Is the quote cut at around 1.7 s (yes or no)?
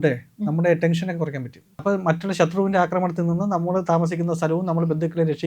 yes